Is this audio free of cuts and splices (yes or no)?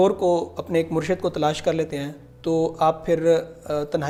yes